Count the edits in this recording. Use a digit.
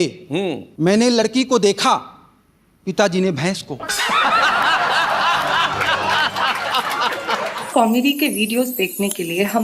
1